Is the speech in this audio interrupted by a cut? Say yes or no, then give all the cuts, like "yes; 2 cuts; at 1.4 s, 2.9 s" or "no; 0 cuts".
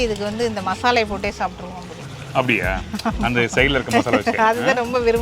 no; 0 cuts